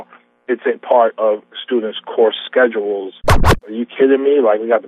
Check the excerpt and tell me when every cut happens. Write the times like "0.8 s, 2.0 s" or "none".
3.4 s